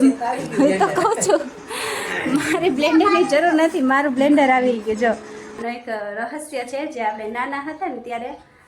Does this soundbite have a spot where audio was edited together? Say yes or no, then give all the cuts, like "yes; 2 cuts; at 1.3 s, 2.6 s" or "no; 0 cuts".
yes; 1 cut; at 5.4 s